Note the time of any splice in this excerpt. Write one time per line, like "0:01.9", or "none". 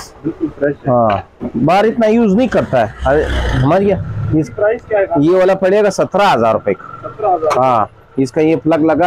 none